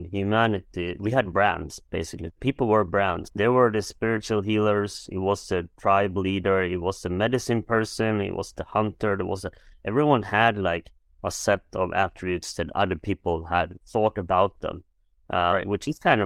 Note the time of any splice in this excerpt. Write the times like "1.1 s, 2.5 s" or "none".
0.9 s, 3.2 s